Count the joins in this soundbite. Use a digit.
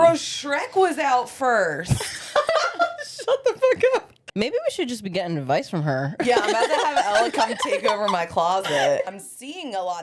2